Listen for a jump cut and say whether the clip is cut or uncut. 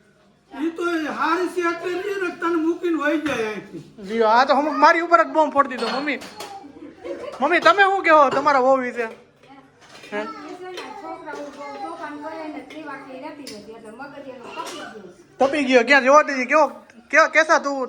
uncut